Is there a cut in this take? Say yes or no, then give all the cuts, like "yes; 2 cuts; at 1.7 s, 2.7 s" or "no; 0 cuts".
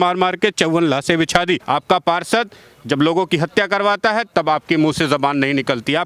no; 0 cuts